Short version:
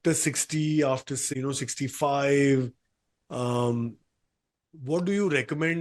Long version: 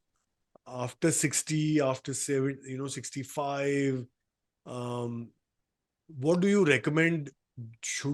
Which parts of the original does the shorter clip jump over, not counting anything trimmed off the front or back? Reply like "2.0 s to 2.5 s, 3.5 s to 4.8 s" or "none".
2.2 s to 2.6 s

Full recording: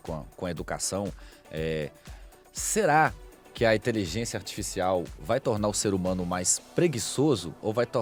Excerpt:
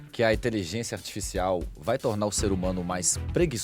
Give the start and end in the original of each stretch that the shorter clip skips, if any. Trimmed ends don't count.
none

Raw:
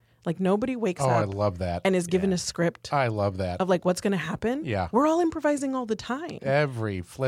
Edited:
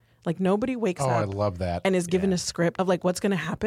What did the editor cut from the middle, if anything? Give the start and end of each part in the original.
2.8 s to 3.6 s

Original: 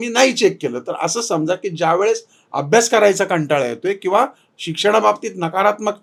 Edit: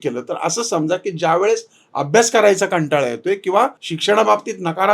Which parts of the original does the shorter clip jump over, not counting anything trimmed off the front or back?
4.4 s to 4.6 s

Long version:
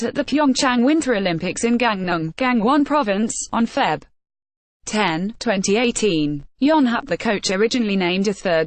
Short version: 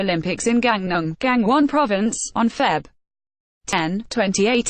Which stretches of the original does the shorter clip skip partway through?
4.9 s to 5.0 s

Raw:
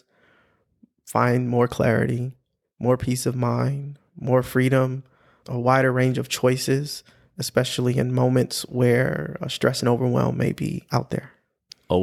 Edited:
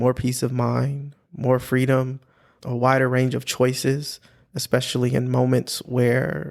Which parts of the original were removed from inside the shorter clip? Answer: none

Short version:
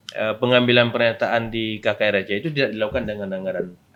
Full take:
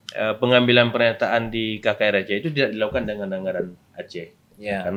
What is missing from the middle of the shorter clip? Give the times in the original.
none

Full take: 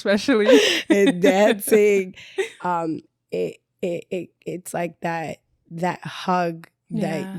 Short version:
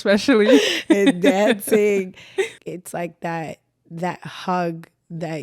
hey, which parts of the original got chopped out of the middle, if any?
2.5 s to 4.3 s

